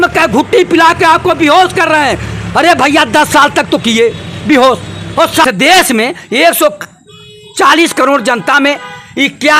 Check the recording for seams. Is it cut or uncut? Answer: cut